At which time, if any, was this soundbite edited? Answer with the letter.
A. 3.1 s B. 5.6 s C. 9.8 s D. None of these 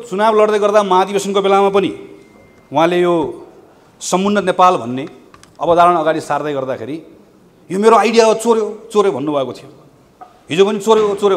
D